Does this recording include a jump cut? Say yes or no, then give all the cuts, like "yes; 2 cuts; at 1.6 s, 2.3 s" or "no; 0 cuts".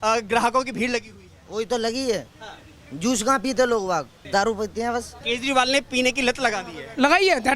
yes; 2 cuts; at 4.2 s, 5.2 s